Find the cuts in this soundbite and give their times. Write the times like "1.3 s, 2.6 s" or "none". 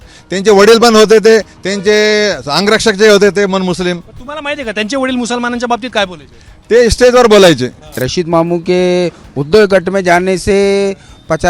8.0 s